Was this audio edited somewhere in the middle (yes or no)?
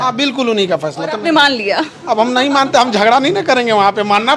no